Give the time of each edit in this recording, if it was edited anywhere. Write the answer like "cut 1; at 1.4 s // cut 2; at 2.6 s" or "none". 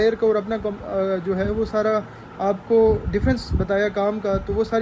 none